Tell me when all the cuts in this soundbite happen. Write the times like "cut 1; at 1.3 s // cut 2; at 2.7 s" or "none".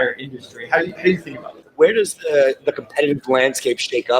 cut 1; at 1.6 s